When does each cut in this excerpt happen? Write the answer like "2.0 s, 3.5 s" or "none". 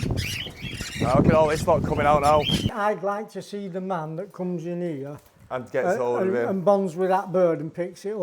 2.7 s